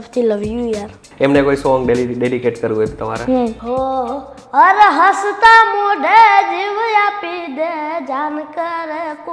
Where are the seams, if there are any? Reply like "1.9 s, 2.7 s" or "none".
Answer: 1.0 s, 3.6 s

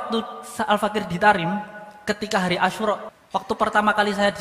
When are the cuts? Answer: 3.1 s

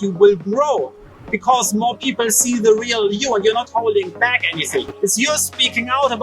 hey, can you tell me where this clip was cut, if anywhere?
4.9 s

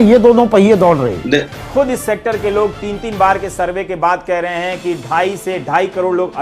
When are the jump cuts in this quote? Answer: 1.5 s

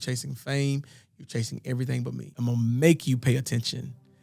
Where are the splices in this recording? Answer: 2.2 s

